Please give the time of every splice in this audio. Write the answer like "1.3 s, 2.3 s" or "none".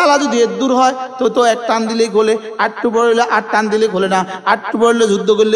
none